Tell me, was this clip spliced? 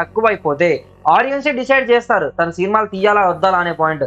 no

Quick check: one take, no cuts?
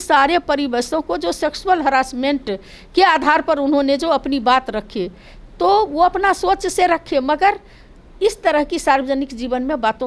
yes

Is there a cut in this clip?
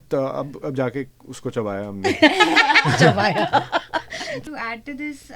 yes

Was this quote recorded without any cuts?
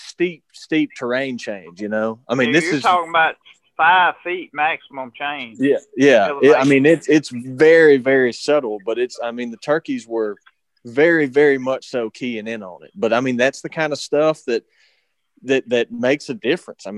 yes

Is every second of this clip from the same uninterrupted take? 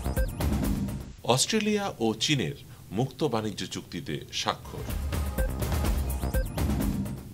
yes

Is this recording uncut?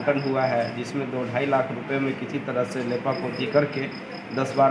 yes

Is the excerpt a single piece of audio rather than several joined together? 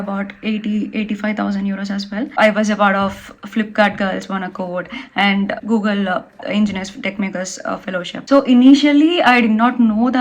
no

